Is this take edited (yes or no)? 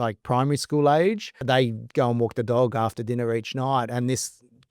yes